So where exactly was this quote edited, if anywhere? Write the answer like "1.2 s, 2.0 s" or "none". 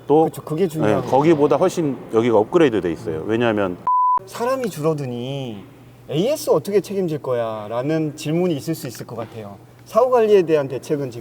4.1 s